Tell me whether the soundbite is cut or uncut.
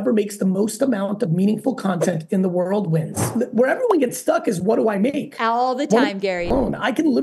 cut